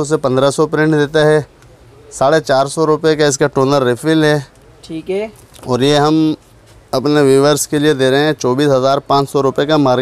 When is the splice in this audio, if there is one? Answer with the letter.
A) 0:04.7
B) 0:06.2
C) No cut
C